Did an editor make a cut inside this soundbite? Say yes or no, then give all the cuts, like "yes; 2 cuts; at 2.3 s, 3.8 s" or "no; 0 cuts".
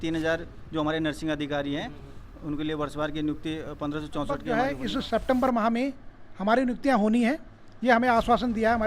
yes; 1 cut; at 4.5 s